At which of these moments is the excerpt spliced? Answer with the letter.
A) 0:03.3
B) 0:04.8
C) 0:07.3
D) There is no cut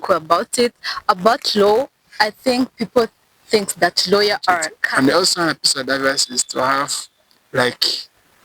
B